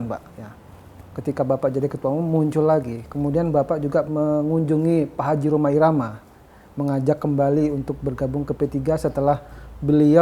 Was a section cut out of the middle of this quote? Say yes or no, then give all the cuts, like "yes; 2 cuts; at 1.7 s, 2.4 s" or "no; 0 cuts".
yes; 1 cut; at 4.1 s